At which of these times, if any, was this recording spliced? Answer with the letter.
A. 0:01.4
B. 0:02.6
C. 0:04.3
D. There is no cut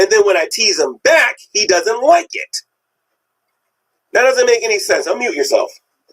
A